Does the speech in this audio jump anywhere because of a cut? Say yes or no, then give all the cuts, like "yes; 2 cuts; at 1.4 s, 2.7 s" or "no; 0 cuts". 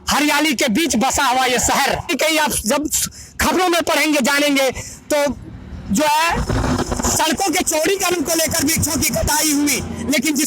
yes; 1 cut; at 2.1 s